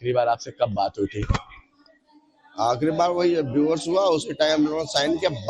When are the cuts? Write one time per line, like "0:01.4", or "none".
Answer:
none